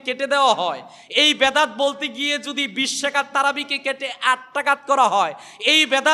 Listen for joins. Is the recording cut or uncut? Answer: uncut